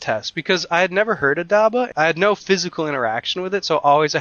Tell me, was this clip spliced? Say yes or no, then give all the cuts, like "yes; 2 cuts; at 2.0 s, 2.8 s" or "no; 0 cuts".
yes; 1 cut; at 1.9 s